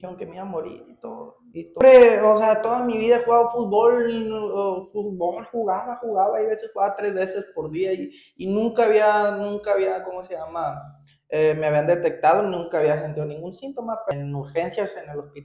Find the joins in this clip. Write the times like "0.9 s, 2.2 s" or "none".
1.8 s, 14.1 s